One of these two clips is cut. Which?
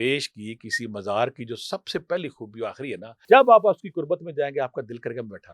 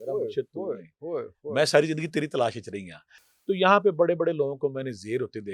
first; 1 cut; at 3.1 s

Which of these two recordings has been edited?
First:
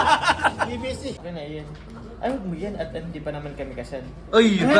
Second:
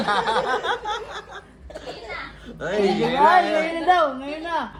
first; 1 cut; at 1.2 s

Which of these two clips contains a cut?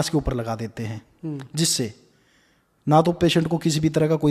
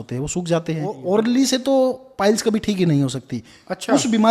second; 1 cut; at 1.0 s

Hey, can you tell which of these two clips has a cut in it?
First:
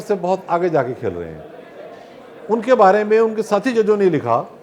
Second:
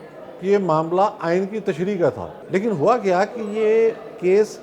second; 1 cut; at 2.3 s

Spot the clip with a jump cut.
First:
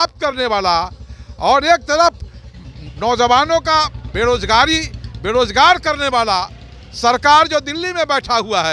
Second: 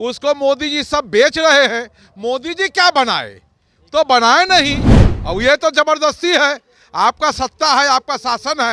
second; 1 cut; at 5.1 s

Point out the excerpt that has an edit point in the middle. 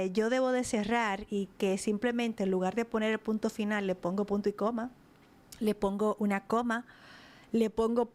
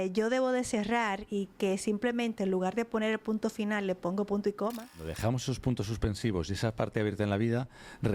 second; 1 cut; at 5.1 s

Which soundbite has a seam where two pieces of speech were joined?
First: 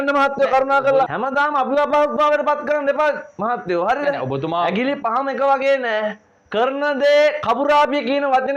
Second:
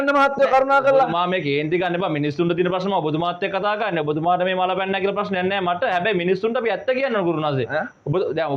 first; 1 cut; at 1.1 s

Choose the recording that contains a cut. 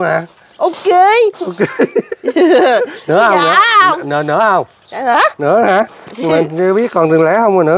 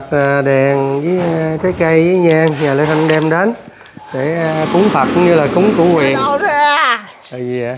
second; 1 cut; at 6.3 s

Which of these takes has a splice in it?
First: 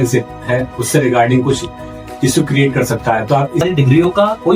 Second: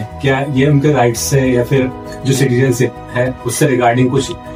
first; 1 cut; at 3.6 s

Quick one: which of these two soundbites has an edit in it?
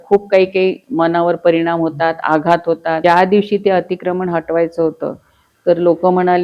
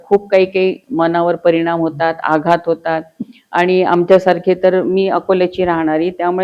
first; 1 cut; at 3.0 s

